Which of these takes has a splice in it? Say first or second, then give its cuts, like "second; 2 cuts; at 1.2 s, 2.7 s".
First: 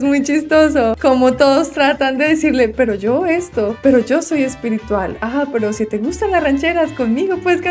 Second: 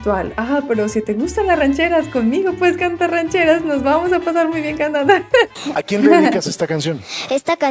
second; 1 cut; at 5.5 s